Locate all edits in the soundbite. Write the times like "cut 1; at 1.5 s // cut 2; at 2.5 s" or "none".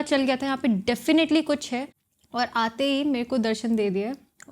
cut 1; at 2.0 s